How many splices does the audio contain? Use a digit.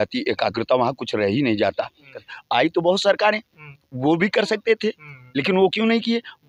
1